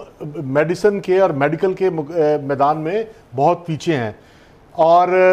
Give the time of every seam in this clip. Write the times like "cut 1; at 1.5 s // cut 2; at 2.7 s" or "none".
none